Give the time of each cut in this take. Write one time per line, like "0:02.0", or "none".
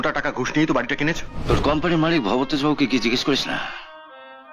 0:01.3